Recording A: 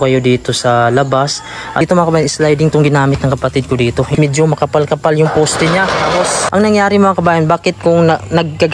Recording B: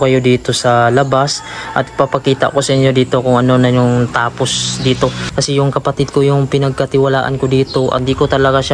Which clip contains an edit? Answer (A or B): A